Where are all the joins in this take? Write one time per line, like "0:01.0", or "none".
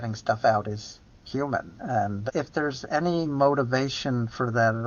0:02.2